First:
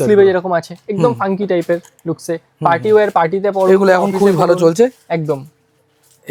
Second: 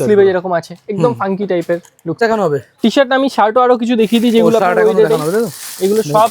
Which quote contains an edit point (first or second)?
second